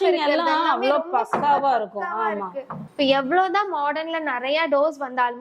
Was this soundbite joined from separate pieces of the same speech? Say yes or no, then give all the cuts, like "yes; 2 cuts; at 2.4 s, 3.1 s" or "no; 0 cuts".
no; 0 cuts